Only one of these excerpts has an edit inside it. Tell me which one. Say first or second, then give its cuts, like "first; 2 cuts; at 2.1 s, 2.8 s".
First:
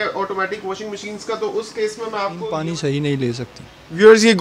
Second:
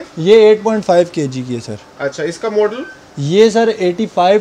first; 1 cut; at 2.4 s